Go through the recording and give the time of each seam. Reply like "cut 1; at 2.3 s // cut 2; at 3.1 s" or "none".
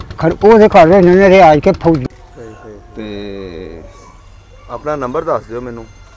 cut 1; at 2.0 s

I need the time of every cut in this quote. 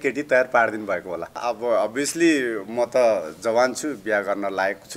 cut 1; at 1.4 s

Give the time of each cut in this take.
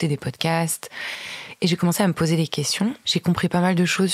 cut 1; at 3.0 s

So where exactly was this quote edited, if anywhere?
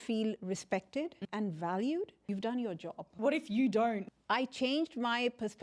cut 1; at 1.2 s // cut 2; at 2.3 s // cut 3; at 3.1 s // cut 4; at 4.1 s

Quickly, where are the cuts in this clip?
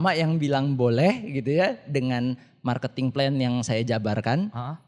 none

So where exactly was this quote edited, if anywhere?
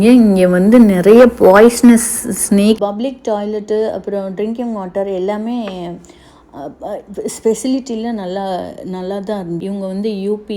cut 1; at 2.8 s // cut 2; at 9.6 s

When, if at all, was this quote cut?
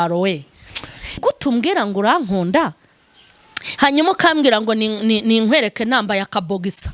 cut 1; at 1.2 s

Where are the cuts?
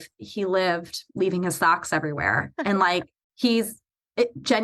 cut 1; at 3.2 s

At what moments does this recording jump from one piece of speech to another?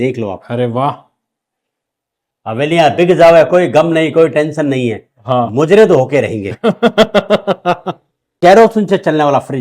cut 1; at 8.3 s

